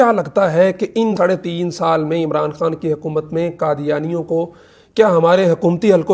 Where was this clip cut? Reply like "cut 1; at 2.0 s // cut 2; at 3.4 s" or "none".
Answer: cut 1; at 1.1 s